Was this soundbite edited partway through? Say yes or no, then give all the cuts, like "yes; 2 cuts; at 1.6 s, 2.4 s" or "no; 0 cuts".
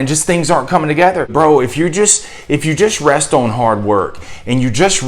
yes; 1 cut; at 1.3 s